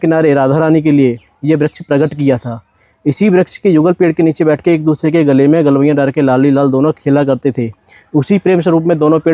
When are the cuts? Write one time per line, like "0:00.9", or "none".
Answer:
none